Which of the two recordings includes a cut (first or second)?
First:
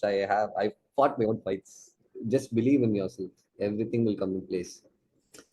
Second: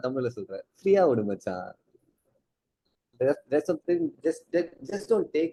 first